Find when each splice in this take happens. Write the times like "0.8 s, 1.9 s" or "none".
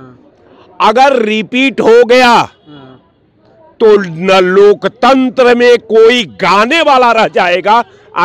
none